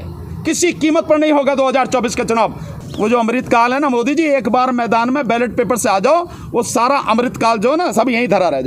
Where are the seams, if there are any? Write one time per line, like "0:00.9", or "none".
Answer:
0:02.7